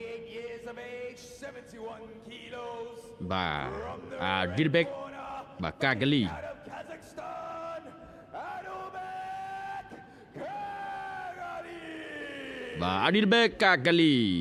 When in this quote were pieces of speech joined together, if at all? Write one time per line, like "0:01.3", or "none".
none